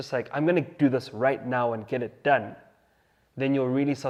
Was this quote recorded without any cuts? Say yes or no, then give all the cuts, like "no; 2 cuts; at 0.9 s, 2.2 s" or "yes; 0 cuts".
yes; 0 cuts